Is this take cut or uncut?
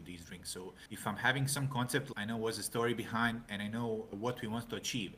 cut